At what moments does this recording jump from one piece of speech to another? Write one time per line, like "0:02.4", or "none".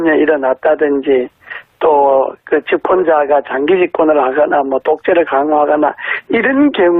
none